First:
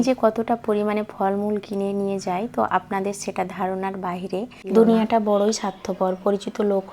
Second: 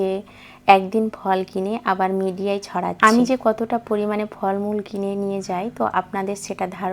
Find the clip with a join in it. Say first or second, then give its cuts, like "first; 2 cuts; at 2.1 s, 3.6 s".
first; 1 cut; at 4.6 s